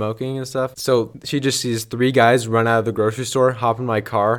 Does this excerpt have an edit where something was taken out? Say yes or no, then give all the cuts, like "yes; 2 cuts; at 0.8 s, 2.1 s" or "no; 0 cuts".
yes; 1 cut; at 1.1 s